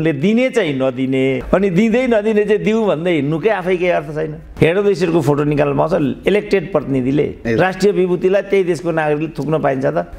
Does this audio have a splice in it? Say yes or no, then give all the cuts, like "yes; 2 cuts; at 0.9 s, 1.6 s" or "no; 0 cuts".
yes; 3 cuts; at 1.4 s, 4.4 s, 7.4 s